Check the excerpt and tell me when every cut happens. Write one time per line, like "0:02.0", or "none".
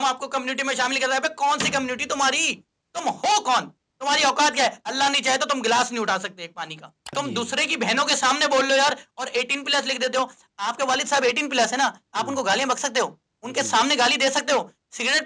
0:07.1